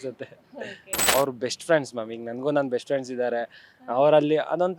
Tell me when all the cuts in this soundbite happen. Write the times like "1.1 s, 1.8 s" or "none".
1.1 s